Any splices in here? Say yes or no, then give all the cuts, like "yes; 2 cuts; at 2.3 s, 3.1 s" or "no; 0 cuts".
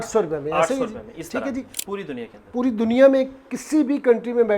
yes; 1 cut; at 1.7 s